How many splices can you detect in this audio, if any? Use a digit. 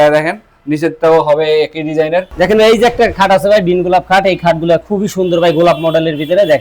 1